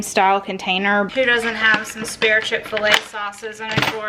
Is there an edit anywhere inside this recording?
yes; 1 cut; at 1.1 s

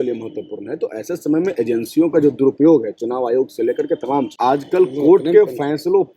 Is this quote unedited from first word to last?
no; 1 cut; at 4.3 s

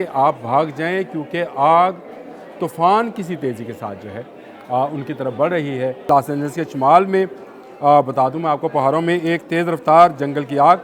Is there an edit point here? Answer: yes; 1 cut; at 6.1 s

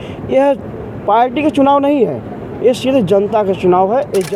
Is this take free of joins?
yes; 0 cuts

